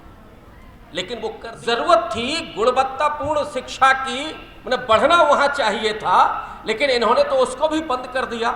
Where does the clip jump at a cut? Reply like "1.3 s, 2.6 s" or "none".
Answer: 1.5 s